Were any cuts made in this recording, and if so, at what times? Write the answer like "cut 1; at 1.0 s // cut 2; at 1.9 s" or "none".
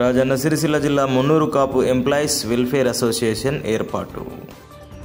none